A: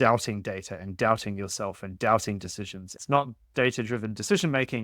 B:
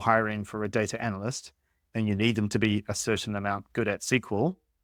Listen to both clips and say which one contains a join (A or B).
A